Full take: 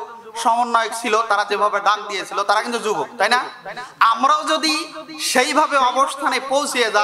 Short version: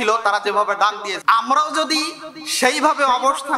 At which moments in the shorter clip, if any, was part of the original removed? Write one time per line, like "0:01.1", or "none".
0:01.1